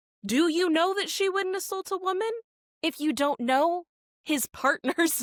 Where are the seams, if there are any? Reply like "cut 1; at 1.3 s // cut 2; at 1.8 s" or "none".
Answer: none